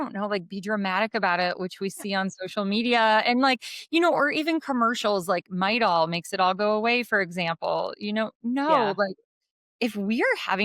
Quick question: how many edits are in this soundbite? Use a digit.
0